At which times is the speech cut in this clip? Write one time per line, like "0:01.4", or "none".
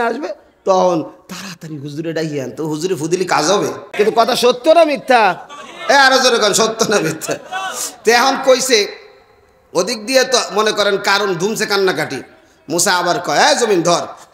0:03.8

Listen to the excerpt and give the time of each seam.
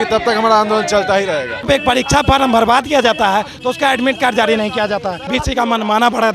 0:01.7
0:05.3

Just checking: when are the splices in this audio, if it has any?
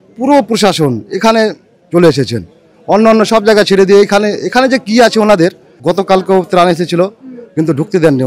0:05.7

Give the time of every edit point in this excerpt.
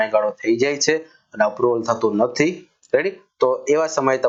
none

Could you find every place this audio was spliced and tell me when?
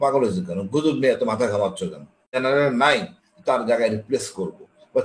0:02.3

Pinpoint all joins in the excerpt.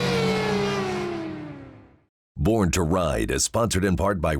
0:02.3

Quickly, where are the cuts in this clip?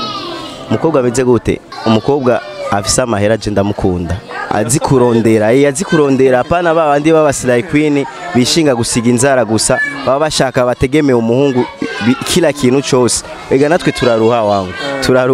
0:01.8

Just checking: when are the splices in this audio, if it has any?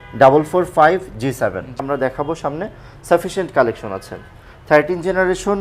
0:01.8

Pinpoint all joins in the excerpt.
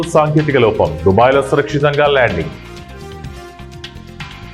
0:02.7

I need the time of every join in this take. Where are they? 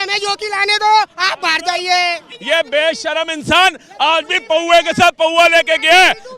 0:02.3

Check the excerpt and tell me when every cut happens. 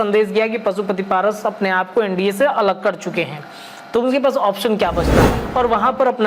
0:05.4

